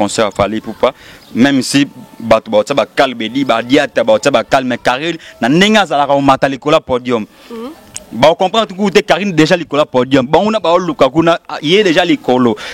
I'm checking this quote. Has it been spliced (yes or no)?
no